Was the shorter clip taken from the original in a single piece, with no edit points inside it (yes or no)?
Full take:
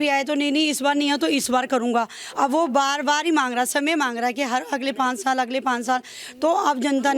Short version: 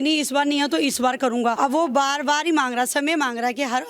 no